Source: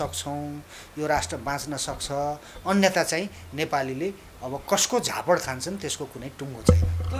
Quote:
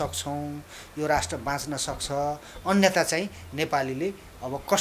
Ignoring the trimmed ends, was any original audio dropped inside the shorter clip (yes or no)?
no